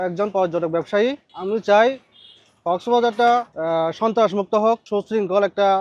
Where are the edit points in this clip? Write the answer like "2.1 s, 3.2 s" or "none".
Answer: 1.3 s, 3.5 s, 4.8 s

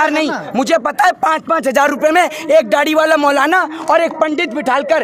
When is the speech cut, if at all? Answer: none

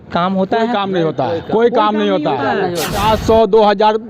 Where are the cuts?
3.0 s

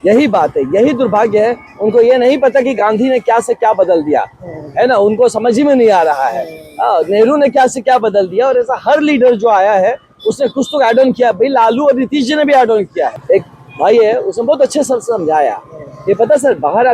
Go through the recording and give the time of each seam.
13.2 s

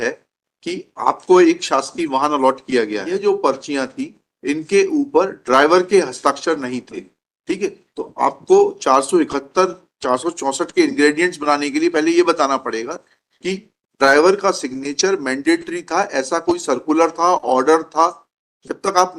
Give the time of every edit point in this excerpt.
3.0 s

